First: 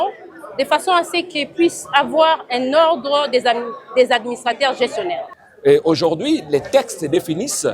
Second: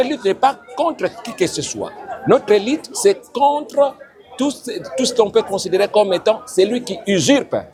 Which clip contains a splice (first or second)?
first